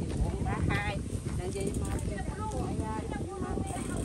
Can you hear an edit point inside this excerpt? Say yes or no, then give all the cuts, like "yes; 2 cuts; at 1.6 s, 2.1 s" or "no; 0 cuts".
no; 0 cuts